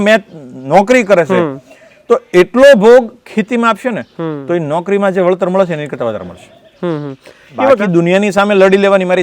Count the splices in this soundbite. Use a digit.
1